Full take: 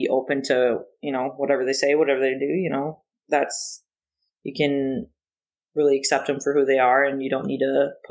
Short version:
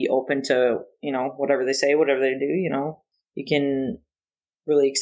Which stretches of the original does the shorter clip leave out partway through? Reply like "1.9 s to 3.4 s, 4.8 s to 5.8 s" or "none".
3.1 s to 4.2 s